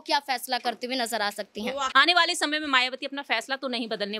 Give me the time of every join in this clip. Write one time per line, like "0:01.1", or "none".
0:01.9

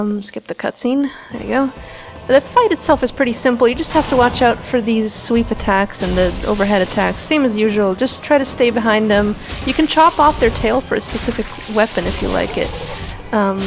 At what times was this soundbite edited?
0:07.2

